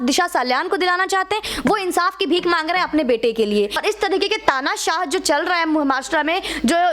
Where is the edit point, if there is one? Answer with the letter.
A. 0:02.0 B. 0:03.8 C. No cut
B